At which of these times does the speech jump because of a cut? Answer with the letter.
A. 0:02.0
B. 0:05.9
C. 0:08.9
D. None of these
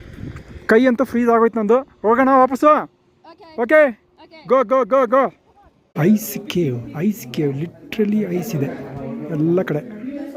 B